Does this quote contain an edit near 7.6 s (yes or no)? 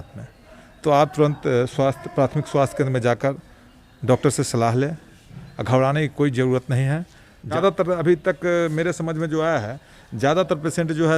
yes